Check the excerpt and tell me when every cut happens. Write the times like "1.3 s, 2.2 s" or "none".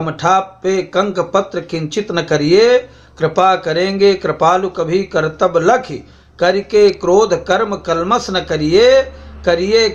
none